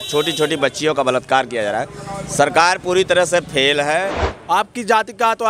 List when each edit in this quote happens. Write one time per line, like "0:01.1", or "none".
0:04.3